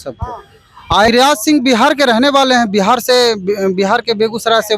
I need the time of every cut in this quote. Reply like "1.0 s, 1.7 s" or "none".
1.1 s